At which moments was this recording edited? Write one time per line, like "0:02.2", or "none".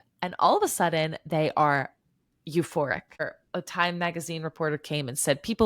0:03.4